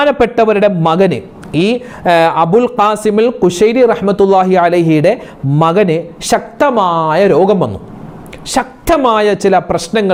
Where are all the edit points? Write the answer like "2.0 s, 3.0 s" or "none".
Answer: none